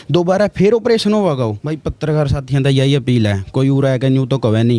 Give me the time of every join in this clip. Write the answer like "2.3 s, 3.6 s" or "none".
1.7 s